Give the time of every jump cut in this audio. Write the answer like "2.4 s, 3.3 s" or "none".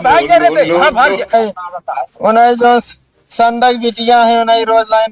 1.3 s